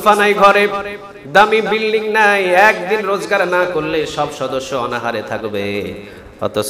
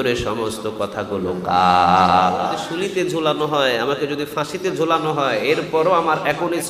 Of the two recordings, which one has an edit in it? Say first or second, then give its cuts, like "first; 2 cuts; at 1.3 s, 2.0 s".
second; 1 cut; at 2.5 s